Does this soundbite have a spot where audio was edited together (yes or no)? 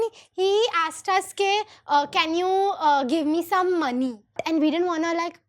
yes